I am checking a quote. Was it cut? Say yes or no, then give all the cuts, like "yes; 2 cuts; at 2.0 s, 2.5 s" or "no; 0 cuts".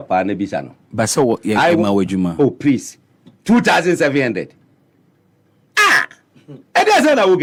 no; 0 cuts